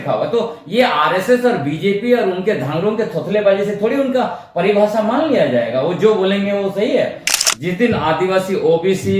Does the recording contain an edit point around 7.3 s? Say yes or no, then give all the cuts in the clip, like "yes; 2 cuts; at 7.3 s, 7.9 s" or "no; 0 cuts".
yes; 1 cut; at 7.3 s